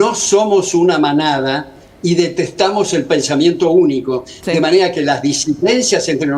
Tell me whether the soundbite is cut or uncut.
uncut